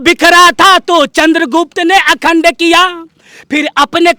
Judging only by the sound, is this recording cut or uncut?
uncut